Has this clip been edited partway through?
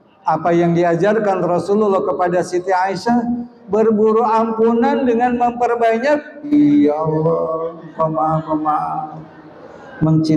yes; 1 cut; at 6.5 s

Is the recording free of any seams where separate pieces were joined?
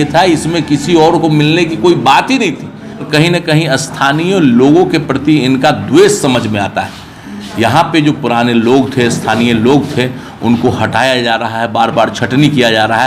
no; 1 cut; at 3.1 s

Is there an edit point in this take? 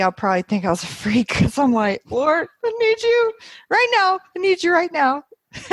no; 0 cuts

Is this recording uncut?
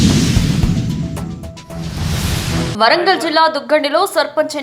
no; 2 cuts; at 1.6 s, 2.7 s

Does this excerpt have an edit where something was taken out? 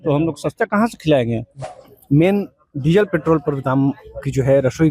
yes; 1 cut; at 1.6 s

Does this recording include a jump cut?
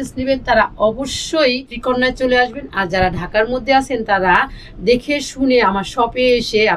yes; 1 cut; at 1.7 s

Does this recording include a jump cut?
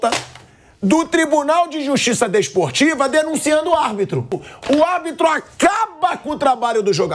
yes; 1 cut; at 4.5 s

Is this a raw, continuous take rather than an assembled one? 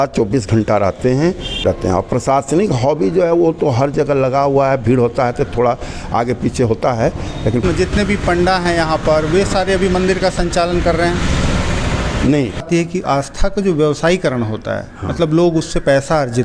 no; 3 cuts; at 1.6 s, 7.6 s, 12.6 s

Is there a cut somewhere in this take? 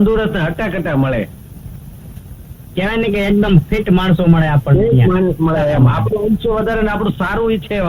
no; 0 cuts

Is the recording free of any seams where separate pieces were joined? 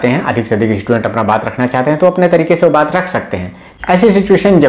no; 1 cut; at 3.6 s

